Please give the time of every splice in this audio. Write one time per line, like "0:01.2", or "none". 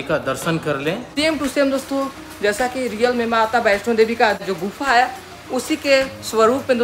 0:01.1
0:04.4